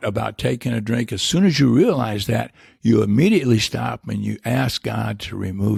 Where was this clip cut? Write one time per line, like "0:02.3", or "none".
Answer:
none

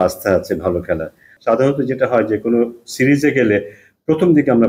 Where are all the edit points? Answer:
0:01.3

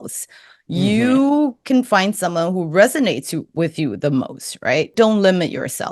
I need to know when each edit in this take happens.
0:04.9

